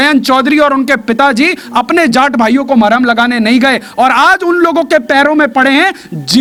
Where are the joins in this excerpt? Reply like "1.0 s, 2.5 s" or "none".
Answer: none

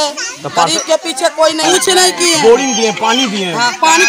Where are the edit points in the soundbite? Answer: 1.6 s

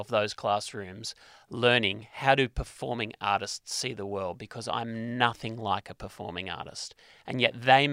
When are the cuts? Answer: none

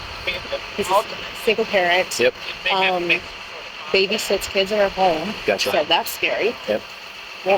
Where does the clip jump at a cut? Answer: none

